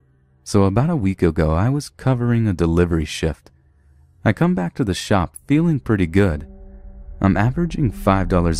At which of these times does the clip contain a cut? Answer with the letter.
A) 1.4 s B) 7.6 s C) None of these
B